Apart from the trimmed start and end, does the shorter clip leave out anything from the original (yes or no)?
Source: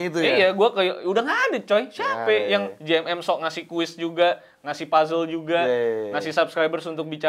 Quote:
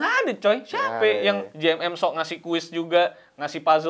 no